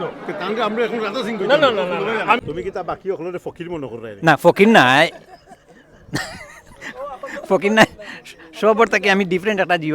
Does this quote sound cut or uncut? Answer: cut